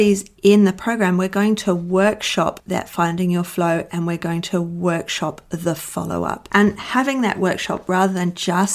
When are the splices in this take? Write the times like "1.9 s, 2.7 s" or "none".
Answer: 2.6 s, 6.5 s